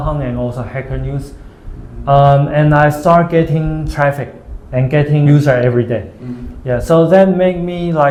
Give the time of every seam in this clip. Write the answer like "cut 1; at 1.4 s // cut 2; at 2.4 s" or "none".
none